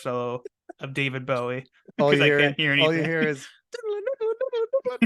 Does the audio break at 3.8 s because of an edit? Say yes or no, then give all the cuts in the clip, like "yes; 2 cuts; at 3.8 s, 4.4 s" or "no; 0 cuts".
no; 1 cut; at 1.9 s